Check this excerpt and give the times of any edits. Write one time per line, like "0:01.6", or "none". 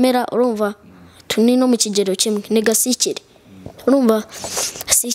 none